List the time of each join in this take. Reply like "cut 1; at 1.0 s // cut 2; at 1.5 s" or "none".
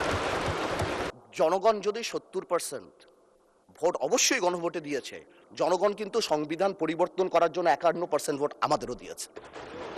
cut 1; at 1.0 s